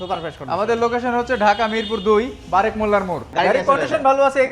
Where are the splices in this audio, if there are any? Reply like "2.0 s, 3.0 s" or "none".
3.2 s